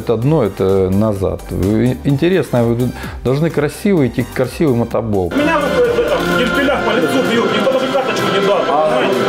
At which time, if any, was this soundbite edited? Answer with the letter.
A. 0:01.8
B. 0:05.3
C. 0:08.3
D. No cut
B